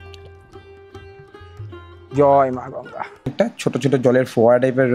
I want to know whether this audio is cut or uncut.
cut